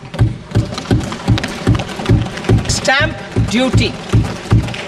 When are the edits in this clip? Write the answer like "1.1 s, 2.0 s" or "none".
2.7 s

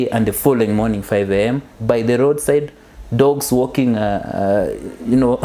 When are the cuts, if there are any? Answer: none

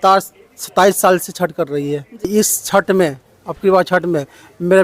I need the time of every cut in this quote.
2.3 s

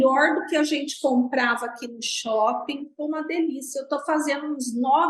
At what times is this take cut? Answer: none

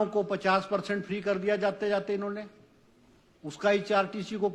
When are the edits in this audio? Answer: none

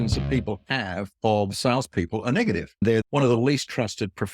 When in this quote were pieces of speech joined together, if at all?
2.9 s

